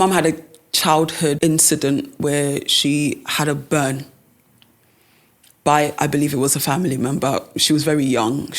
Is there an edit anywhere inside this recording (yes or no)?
yes